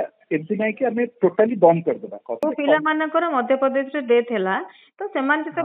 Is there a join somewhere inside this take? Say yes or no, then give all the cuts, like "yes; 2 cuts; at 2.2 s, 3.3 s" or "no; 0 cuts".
yes; 1 cut; at 2.4 s